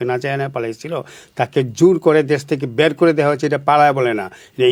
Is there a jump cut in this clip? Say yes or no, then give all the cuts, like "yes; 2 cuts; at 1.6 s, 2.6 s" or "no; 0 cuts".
no; 0 cuts